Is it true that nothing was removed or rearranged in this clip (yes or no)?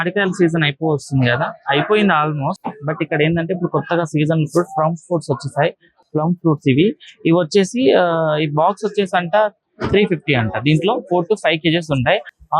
yes